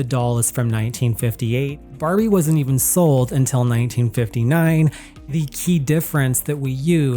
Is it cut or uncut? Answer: cut